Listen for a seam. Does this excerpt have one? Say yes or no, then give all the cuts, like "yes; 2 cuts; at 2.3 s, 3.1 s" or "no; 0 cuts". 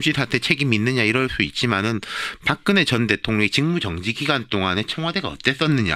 yes; 1 cut; at 2.3 s